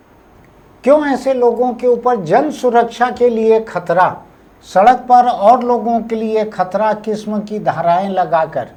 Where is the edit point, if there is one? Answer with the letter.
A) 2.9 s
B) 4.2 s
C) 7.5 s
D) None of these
D